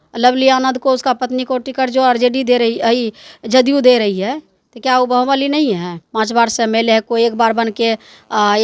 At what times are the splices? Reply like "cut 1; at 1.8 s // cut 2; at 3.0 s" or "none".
cut 1; at 6.0 s